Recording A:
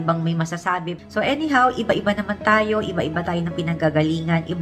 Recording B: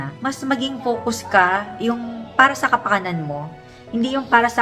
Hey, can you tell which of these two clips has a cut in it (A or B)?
A